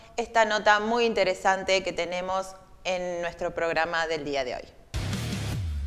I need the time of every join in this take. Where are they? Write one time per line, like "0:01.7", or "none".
0:04.8

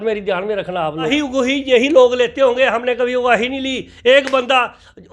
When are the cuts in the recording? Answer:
0:01.1

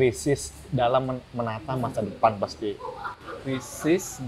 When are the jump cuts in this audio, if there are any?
none

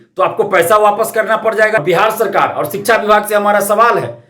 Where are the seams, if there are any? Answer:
0:01.8

